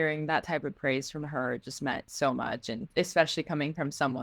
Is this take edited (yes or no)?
yes